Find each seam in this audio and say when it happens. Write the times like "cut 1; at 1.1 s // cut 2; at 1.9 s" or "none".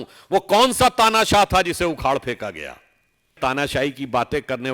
cut 1; at 3.4 s